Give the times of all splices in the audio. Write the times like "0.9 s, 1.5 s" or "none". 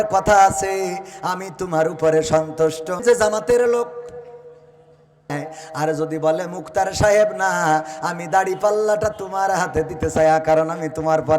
3.0 s, 5.3 s